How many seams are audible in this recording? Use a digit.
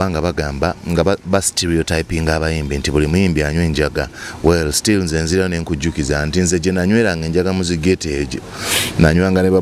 0